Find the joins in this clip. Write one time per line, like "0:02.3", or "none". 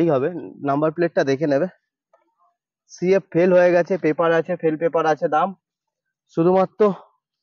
none